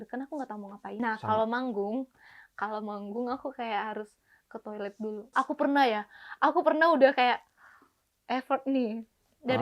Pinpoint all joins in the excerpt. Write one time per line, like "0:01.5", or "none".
0:00.9
0:05.3